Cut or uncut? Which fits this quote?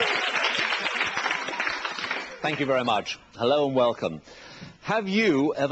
cut